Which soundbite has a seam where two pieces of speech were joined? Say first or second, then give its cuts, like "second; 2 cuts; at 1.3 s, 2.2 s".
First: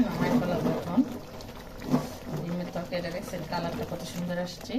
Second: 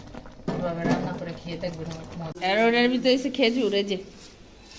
second; 1 cut; at 2.6 s